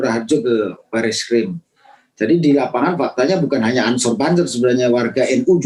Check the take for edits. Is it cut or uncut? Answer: uncut